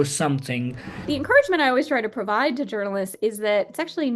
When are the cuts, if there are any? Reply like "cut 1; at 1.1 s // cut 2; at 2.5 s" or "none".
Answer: cut 1; at 1.1 s